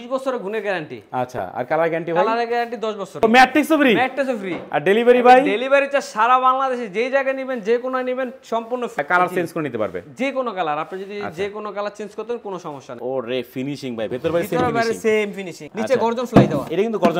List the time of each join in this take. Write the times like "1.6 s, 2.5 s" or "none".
3.2 s, 9.0 s, 13.0 s, 15.6 s